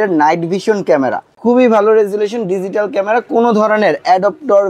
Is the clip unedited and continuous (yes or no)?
no